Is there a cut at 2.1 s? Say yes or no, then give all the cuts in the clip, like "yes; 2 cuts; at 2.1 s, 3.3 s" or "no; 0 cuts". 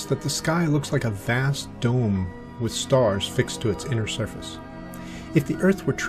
no; 0 cuts